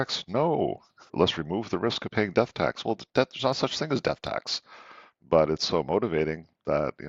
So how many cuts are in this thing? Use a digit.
1